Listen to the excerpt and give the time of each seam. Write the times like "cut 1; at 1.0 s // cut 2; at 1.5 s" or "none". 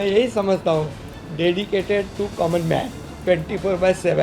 none